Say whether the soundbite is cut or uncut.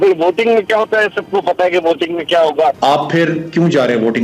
cut